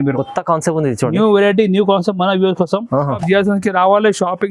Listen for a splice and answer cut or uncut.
cut